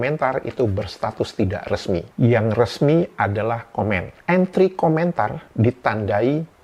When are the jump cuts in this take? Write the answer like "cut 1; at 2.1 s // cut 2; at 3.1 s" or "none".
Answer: cut 1; at 4.2 s